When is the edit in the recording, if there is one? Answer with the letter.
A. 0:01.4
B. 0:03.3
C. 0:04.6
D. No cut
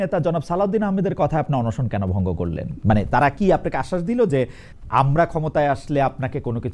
C